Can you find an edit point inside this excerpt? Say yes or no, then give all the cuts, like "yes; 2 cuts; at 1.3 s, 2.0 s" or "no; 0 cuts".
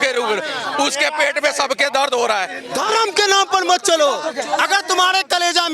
yes; 1 cut; at 2.7 s